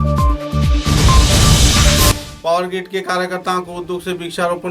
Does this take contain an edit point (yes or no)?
yes